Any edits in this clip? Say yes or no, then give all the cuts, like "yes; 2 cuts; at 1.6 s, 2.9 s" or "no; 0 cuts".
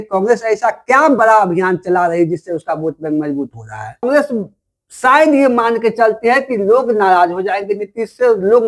yes; 1 cut; at 4.0 s